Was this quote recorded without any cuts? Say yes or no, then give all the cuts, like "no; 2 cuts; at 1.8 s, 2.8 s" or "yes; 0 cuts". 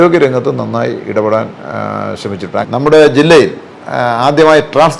no; 1 cut; at 2.6 s